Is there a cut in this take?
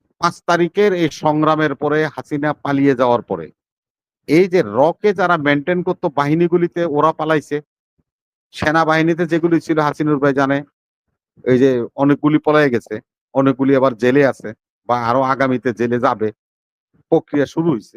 no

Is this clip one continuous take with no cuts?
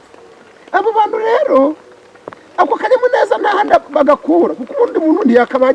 yes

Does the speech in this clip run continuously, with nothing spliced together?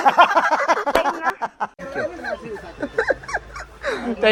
yes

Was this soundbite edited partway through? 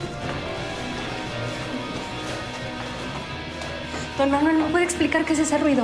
yes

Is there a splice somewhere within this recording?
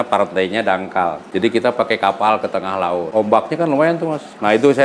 yes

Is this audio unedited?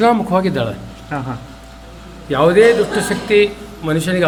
yes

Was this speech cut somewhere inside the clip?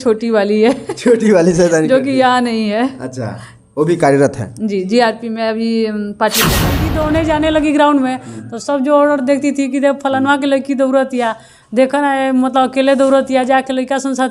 yes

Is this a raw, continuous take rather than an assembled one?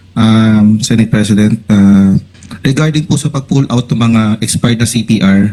yes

